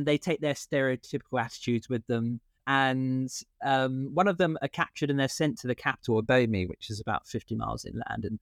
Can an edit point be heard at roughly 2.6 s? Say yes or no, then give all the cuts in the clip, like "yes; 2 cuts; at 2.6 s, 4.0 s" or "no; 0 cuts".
yes; 1 cut; at 2.6 s